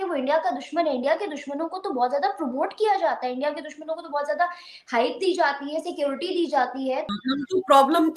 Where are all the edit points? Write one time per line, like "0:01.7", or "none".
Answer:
0:07.1